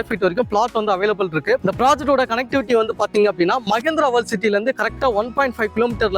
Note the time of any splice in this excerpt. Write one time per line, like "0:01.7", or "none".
0:01.6